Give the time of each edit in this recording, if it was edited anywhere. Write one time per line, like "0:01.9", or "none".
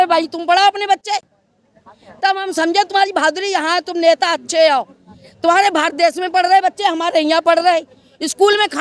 none